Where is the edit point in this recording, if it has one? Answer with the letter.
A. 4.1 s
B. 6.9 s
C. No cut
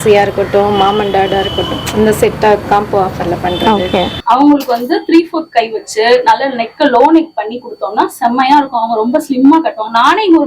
A